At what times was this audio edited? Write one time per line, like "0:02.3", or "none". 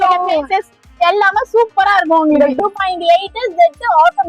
0:02.5

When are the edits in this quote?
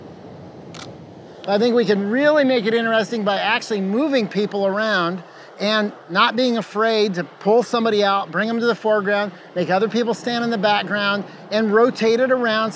0:01.0

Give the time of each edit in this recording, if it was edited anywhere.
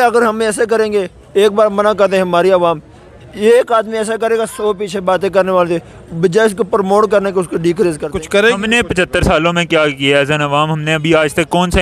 0:08.1

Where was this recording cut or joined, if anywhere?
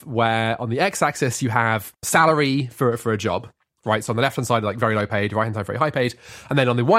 0:02.0

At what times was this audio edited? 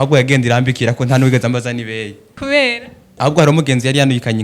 0:02.3
0:03.1

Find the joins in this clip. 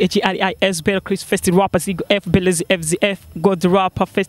none

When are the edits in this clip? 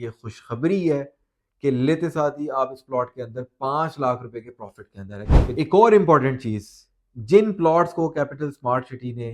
0:05.5

